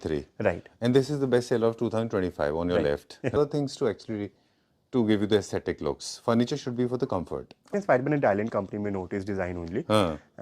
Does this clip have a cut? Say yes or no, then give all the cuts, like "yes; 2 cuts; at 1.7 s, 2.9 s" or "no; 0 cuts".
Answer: yes; 2 cuts; at 3.4 s, 7.7 s